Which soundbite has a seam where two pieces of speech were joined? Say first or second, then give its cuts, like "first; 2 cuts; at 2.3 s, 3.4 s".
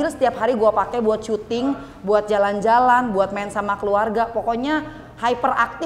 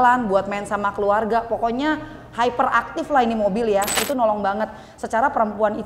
second; 1 cut; at 3.9 s